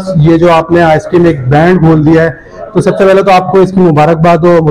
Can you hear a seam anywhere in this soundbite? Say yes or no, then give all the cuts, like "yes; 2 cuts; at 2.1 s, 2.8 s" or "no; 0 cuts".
no; 0 cuts